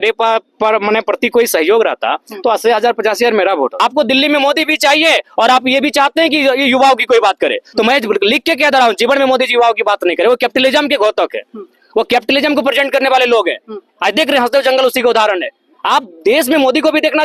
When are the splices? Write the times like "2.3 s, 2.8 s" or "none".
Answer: 3.8 s